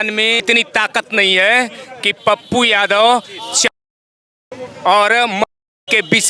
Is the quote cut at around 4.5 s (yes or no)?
no